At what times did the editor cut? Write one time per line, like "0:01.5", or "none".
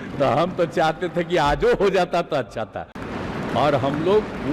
0:03.0